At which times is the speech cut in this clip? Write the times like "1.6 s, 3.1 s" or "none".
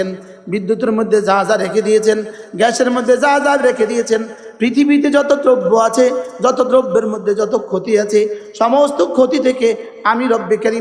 none